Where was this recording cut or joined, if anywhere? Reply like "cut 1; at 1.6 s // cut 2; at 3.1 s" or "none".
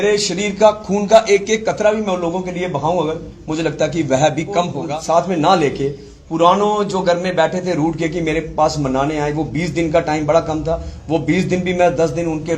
cut 1; at 4.8 s